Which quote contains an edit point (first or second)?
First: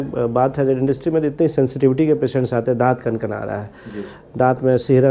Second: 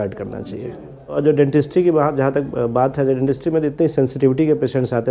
second